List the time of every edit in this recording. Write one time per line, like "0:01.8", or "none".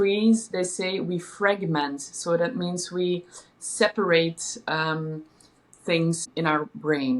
0:06.3